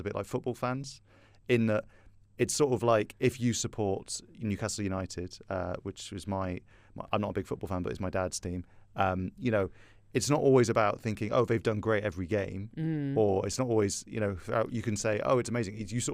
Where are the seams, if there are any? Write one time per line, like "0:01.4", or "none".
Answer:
none